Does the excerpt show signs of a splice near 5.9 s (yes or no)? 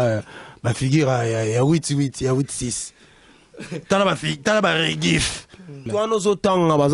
yes